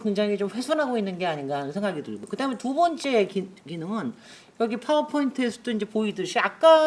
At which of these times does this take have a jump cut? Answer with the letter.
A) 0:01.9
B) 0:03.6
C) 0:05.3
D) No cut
D